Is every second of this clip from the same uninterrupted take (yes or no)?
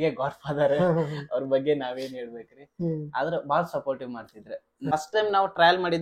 no